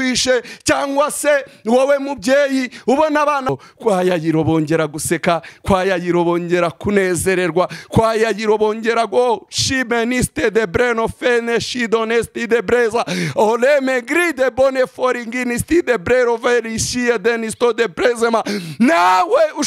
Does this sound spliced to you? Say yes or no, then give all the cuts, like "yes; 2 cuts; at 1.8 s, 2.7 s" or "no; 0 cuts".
yes; 1 cut; at 3.5 s